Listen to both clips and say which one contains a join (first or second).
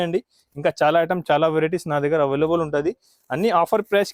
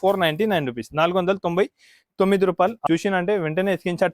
second